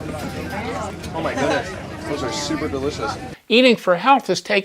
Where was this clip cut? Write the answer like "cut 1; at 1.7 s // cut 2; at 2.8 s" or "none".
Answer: cut 1; at 0.9 s // cut 2; at 3.3 s